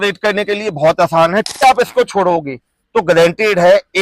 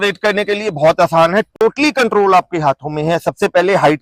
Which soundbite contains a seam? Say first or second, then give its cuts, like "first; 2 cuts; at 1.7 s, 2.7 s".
first; 1 cut; at 1.6 s